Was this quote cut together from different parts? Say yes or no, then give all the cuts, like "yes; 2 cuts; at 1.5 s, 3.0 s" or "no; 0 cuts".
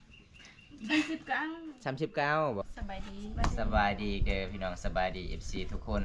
yes; 1 cut; at 2.6 s